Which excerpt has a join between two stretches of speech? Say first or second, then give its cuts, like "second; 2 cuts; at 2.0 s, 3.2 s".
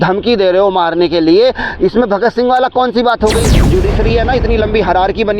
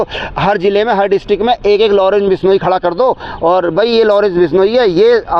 first; 1 cut; at 3.7 s